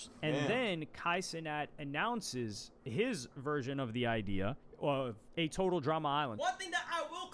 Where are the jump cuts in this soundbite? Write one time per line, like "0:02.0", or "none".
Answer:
0:06.3